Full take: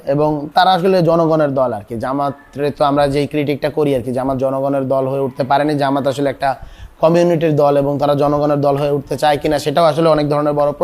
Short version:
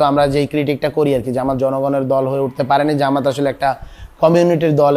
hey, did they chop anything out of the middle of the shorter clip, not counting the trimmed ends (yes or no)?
no